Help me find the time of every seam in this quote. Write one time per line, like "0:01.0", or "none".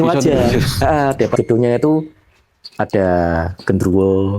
0:01.3